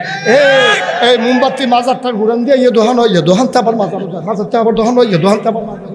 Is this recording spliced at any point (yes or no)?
no